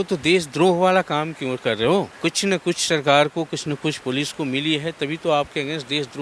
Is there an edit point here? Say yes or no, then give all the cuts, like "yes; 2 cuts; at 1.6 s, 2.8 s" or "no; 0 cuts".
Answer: yes; 1 cut; at 2.1 s